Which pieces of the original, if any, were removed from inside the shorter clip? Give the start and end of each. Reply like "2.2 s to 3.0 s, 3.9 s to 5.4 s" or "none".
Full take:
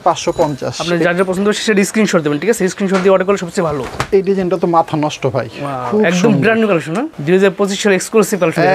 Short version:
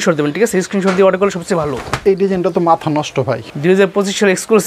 5.6 s to 7.1 s